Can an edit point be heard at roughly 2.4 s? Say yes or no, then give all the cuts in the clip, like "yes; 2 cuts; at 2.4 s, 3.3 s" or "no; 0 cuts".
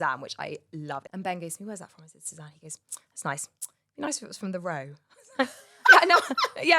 no; 1 cut; at 1.1 s